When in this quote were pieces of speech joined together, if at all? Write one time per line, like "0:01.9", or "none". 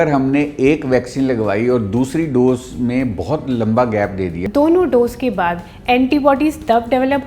0:04.4